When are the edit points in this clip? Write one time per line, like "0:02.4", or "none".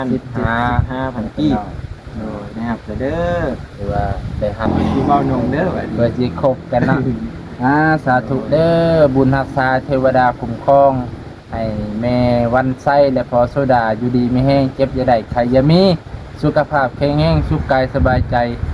0:04.7